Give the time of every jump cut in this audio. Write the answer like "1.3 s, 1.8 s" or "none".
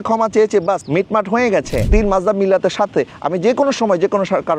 0.8 s, 1.9 s